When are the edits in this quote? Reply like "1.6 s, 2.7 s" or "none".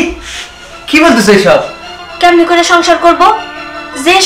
1.9 s